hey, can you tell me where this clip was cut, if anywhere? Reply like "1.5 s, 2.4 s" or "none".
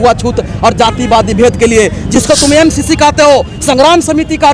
none